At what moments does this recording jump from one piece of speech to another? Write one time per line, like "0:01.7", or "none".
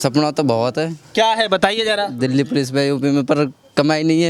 none